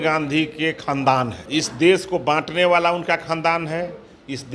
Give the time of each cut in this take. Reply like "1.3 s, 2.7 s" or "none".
1.4 s